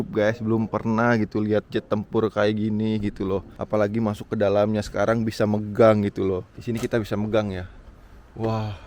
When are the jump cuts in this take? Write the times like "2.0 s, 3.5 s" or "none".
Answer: 6.5 s